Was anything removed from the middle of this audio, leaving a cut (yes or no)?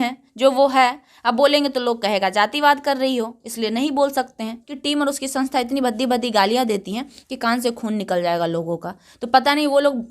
yes